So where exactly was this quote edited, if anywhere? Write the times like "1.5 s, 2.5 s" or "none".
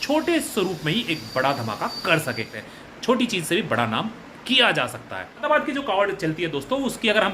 2.5 s, 5.4 s